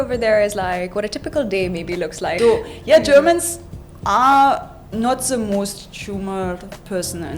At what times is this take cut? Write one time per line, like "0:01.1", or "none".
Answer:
0:02.4